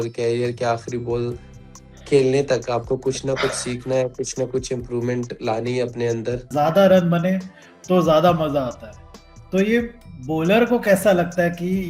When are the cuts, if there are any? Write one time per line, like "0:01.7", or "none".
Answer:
0:06.5